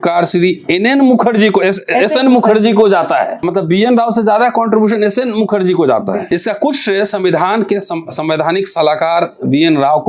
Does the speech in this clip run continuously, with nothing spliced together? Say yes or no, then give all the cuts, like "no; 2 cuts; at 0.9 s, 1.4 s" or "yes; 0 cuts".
no; 2 cuts; at 3.4 s, 6.3 s